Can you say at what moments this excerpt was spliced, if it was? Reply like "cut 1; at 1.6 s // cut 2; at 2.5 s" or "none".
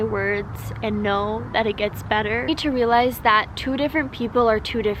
cut 1; at 2.5 s